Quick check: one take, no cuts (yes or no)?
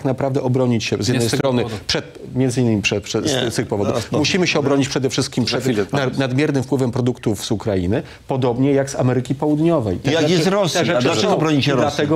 yes